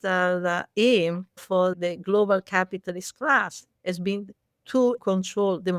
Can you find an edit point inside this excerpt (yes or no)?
yes